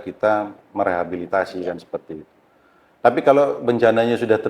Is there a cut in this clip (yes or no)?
no